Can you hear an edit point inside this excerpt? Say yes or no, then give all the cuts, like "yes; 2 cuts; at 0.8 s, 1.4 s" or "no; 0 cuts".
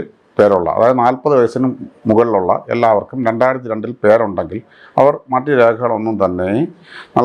no; 0 cuts